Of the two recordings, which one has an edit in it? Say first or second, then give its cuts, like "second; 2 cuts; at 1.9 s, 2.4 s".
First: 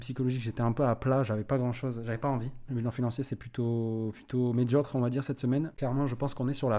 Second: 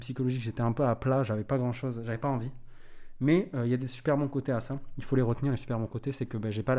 first; 2 cuts; at 2.7 s, 5.7 s